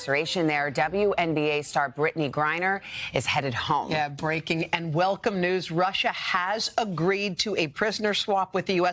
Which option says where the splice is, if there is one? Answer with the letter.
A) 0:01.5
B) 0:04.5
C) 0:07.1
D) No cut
D